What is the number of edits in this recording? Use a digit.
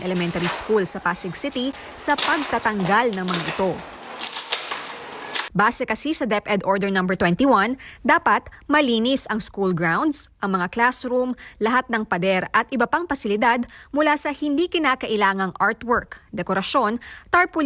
1